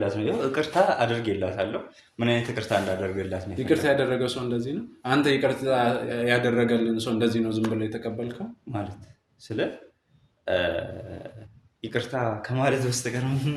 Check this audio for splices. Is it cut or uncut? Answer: uncut